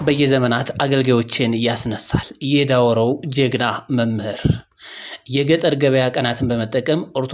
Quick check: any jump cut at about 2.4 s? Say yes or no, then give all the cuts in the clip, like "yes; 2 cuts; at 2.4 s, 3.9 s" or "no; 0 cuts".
no; 0 cuts